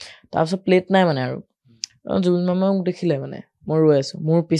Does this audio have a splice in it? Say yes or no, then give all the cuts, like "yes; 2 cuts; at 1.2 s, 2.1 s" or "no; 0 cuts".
no; 0 cuts